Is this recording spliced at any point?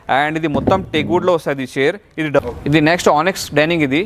yes; 1 cut; at 2.4 s

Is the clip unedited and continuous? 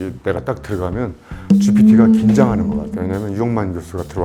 yes; 0 cuts

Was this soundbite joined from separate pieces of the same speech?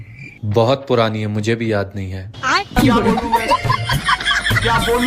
no; 0 cuts

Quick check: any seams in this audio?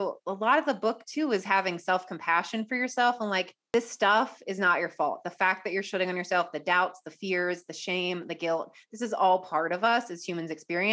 yes; 1 cut; at 3.6 s

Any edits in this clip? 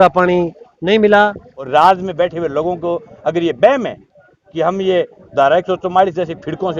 yes; 1 cut; at 1.5 s

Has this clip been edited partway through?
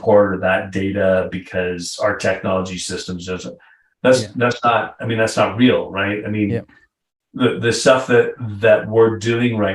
no; 0 cuts

